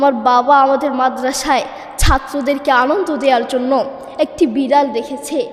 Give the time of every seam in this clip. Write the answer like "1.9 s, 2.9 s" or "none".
none

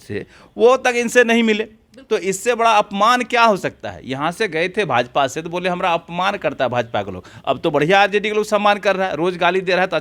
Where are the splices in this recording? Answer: none

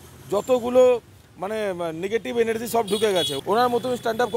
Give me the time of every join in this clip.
3.3 s

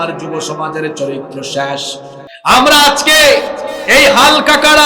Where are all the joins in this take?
2.2 s

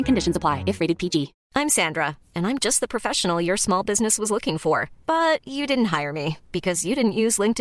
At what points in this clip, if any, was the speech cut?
1.4 s

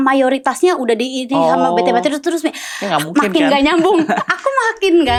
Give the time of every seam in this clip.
none

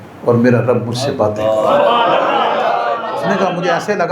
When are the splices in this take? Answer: none

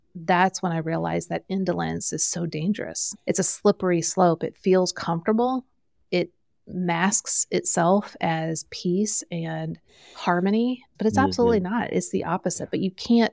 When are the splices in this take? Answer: 3.2 s, 10.9 s

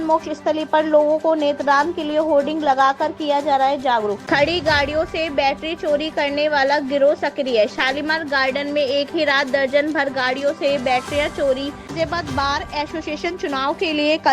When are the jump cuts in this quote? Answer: 4.2 s, 11.9 s

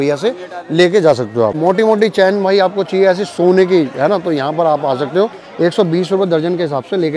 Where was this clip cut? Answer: 1.6 s

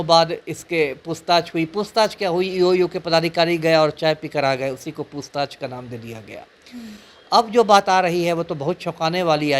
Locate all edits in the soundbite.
none

